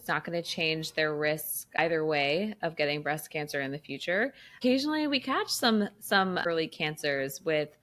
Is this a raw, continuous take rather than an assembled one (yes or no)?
yes